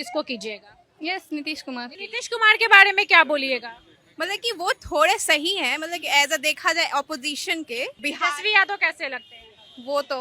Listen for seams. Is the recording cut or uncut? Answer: uncut